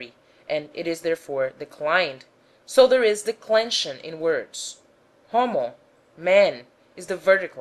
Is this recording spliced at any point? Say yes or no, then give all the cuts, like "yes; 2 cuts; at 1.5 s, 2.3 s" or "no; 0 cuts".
no; 0 cuts